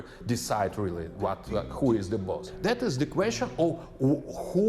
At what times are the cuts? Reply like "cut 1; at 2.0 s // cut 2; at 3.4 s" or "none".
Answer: cut 1; at 2.5 s